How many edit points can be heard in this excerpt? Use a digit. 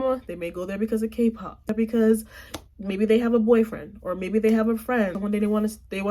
2